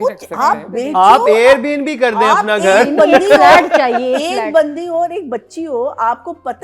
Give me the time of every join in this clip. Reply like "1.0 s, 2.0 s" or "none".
none